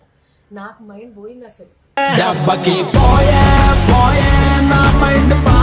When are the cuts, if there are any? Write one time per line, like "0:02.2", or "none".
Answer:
none